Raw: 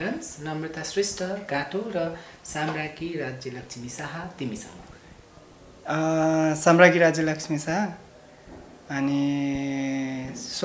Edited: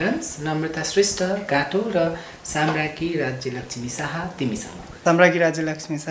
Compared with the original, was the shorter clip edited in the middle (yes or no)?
yes